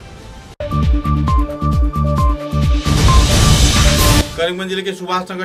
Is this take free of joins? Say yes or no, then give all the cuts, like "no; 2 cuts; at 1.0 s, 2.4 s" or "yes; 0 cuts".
no; 1 cut; at 4.3 s